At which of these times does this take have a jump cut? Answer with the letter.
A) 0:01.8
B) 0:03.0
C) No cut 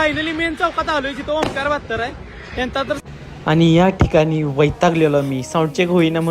B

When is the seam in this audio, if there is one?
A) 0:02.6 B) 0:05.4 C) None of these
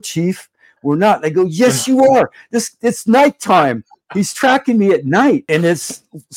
B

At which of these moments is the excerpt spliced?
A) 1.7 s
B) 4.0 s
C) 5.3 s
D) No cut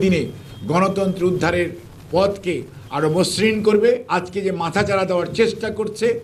B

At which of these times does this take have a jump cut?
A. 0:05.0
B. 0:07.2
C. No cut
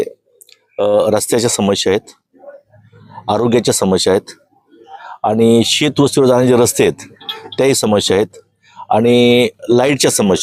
C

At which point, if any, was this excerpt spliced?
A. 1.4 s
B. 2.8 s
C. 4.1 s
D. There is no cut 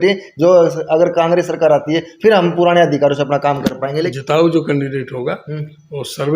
C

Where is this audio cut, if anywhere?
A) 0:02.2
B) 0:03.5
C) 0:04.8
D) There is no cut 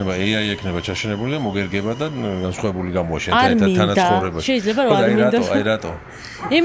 D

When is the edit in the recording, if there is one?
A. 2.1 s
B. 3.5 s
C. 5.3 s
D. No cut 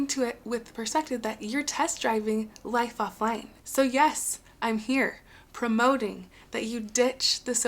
B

